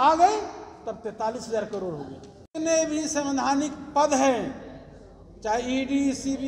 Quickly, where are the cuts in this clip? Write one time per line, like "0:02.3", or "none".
0:02.4